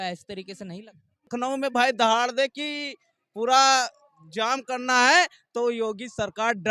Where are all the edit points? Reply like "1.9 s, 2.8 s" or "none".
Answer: 1.3 s